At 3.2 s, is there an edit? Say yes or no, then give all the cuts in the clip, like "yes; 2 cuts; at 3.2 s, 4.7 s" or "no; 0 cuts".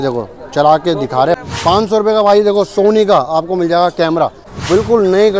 no; 2 cuts; at 1.4 s, 4.5 s